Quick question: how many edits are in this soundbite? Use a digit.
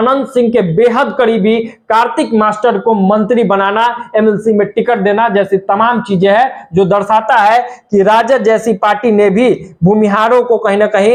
0